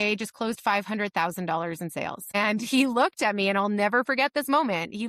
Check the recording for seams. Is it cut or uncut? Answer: cut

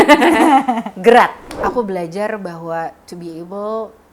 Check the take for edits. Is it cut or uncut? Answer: cut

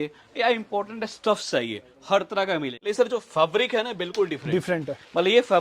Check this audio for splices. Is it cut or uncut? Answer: cut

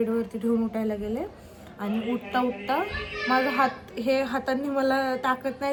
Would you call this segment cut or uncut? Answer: uncut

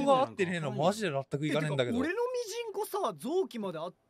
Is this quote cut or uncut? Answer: uncut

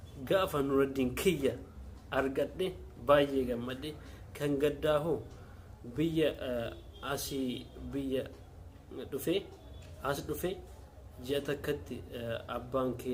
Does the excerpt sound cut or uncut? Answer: uncut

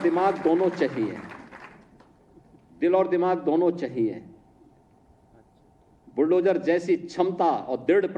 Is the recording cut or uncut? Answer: uncut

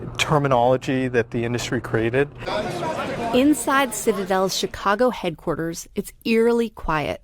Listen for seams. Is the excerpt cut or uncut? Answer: cut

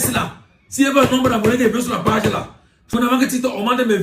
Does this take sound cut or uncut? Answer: cut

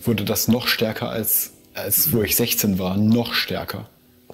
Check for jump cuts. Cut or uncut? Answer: uncut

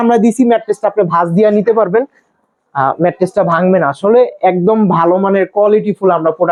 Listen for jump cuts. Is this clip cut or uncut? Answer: uncut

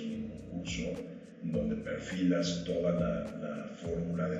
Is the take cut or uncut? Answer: uncut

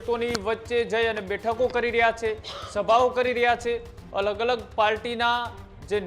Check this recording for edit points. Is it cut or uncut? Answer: uncut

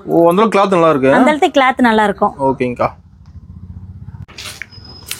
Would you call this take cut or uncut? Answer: uncut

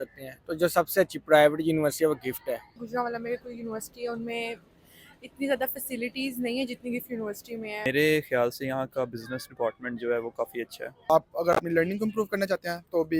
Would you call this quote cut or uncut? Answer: cut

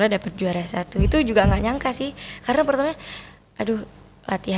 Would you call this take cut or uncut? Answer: uncut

